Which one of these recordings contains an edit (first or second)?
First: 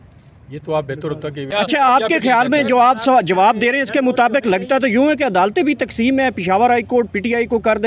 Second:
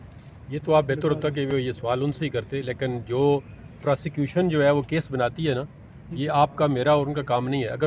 first